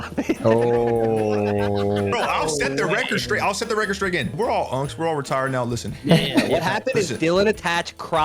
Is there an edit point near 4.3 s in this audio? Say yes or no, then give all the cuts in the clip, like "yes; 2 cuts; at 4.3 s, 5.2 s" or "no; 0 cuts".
yes; 2 cuts; at 2.0 s, 4.3 s